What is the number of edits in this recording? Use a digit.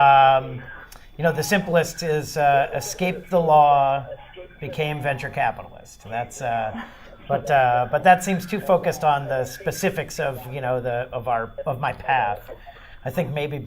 1